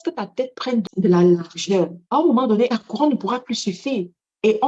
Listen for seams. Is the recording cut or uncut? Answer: cut